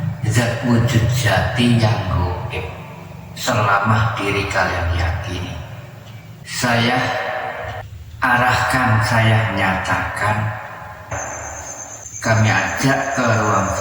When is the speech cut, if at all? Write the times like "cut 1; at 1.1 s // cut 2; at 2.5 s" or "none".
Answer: cut 1; at 6.5 s // cut 2; at 11.1 s